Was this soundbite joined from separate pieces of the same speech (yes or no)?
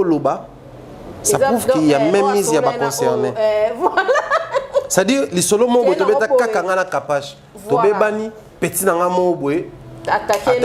no